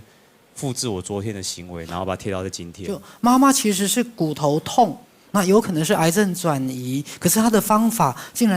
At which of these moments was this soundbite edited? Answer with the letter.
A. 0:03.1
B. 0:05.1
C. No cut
A